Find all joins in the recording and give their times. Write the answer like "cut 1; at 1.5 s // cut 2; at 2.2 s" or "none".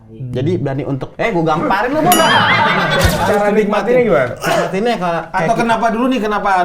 cut 1; at 3.2 s